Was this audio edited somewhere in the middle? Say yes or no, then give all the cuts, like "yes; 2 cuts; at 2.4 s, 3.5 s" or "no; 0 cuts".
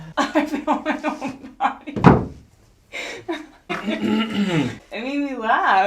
yes; 2 cuts; at 3.6 s, 4.9 s